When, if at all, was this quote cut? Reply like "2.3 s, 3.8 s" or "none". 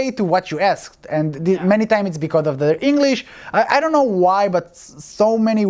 none

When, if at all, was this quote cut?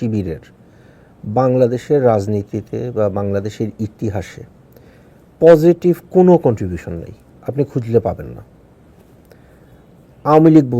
9.5 s

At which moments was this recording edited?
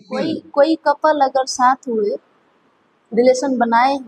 none

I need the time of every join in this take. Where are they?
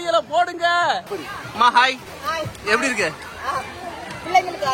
1.1 s, 2.1 s

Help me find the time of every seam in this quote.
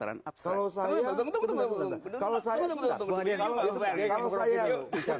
none

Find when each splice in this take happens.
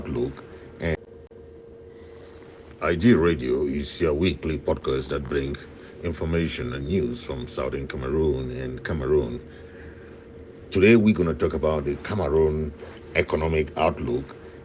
0.9 s

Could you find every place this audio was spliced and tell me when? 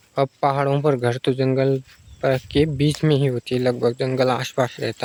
none

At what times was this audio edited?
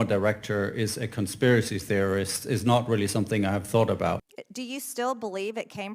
4.2 s

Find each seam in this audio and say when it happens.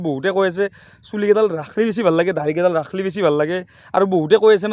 none

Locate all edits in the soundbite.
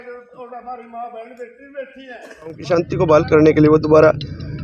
2.6 s

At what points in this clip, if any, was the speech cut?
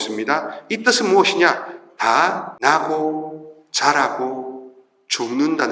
2.5 s

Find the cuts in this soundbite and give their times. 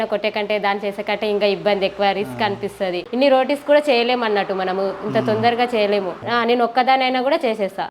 6.2 s

